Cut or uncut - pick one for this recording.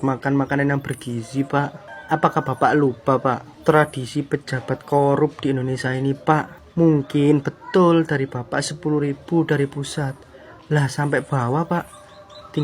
cut